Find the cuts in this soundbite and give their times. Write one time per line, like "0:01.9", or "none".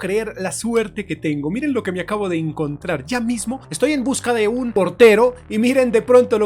0:03.7
0:04.7